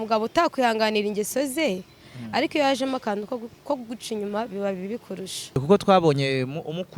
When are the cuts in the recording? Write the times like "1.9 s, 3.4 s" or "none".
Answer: 5.6 s